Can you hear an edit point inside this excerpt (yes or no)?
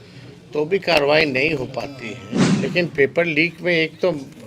yes